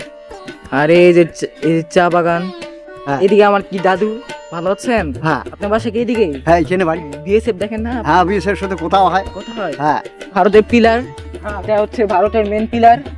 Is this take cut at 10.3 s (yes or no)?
yes